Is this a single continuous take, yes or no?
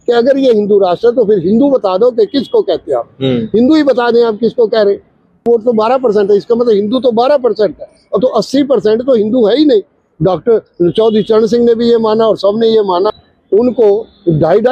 no